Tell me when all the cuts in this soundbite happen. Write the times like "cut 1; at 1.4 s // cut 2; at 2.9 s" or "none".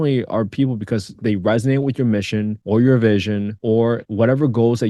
cut 1; at 2.6 s // cut 2; at 3.8 s